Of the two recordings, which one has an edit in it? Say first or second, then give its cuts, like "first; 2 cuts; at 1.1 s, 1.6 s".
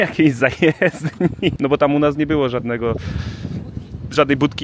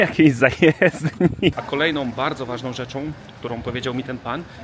second; 1 cut; at 1.6 s